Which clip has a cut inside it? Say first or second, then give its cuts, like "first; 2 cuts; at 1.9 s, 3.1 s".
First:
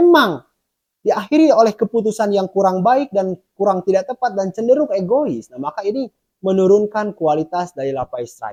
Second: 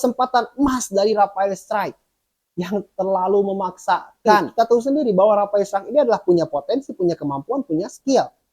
second; 1 cut; at 4.5 s